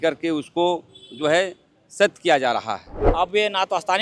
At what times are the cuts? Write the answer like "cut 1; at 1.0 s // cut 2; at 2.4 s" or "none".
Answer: cut 1; at 3.0 s